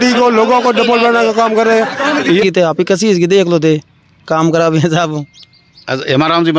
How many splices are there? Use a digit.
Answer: 1